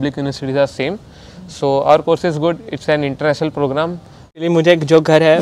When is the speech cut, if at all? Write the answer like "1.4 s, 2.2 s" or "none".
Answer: 4.4 s